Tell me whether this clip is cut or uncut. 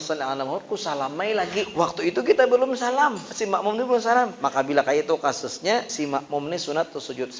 cut